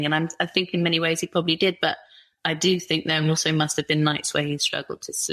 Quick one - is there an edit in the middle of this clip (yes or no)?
no